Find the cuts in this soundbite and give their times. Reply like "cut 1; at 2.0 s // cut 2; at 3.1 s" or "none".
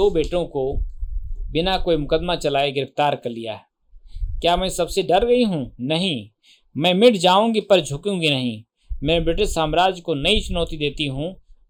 none